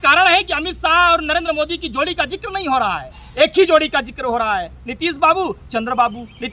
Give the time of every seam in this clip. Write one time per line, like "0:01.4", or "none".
none